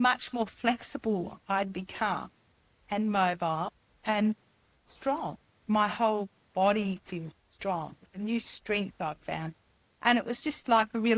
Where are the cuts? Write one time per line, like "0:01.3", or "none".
0:05.6